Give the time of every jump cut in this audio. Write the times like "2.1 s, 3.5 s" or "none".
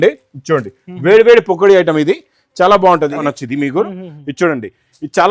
3.2 s